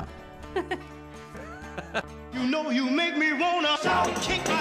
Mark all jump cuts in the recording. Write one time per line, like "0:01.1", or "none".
0:02.1